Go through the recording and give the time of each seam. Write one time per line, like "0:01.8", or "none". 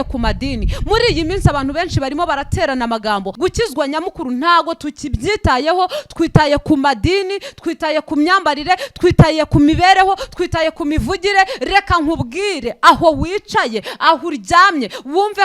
0:03.3